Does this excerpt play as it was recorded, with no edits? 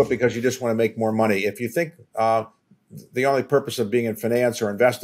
yes; 0 cuts

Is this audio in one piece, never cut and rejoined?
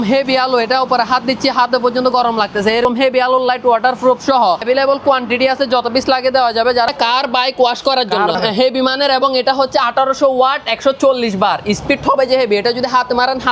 no; 4 cuts; at 2.9 s, 4.6 s, 6.9 s, 8.4 s

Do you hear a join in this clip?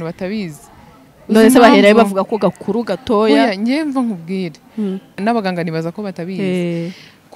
yes; 1 cut; at 5.2 s

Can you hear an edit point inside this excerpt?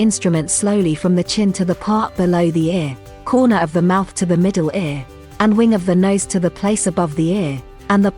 no; 0 cuts

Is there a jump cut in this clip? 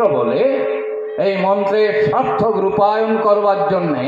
no; 0 cuts

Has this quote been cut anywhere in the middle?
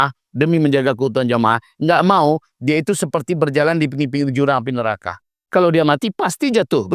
yes; 1 cut; at 5.4 s

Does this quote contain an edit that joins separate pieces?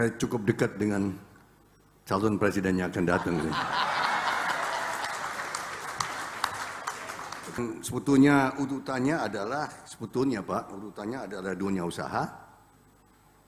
yes; 1 cut; at 7.6 s

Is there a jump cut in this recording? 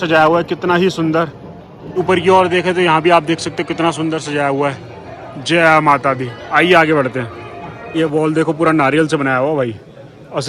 no; 0 cuts

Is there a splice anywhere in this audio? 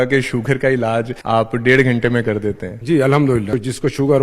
yes; 3 cuts; at 1.2 s, 2.7 s, 3.5 s

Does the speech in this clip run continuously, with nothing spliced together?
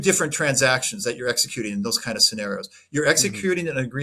yes; 0 cuts

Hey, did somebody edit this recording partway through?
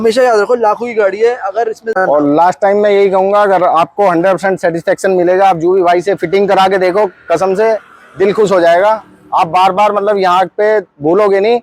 yes; 1 cut; at 2.0 s

